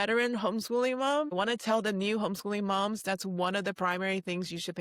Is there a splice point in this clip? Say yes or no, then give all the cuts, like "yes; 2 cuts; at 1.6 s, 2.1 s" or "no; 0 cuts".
no; 0 cuts